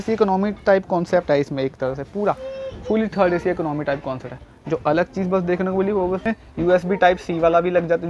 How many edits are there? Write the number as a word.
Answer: one